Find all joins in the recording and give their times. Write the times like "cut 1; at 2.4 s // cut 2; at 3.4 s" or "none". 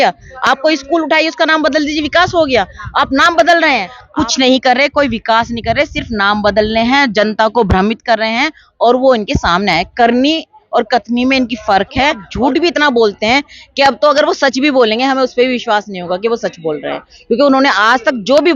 cut 1; at 4.0 s // cut 2; at 12.3 s